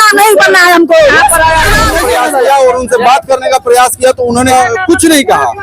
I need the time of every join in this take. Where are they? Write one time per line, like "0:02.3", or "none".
0:01.9
0:04.5